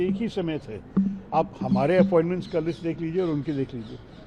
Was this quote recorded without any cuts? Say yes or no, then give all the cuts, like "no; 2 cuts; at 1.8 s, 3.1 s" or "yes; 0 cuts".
yes; 0 cuts